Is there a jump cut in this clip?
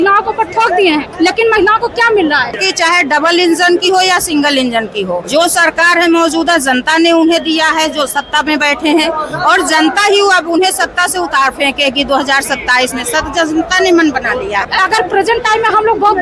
yes; 4 cuts; at 1.1 s, 2.6 s, 5.2 s, 14.6 s

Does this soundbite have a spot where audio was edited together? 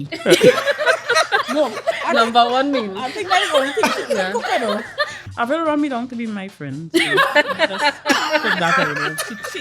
yes; 1 cut; at 5.3 s

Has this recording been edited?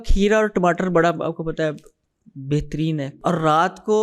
yes; 1 cut; at 3.1 s

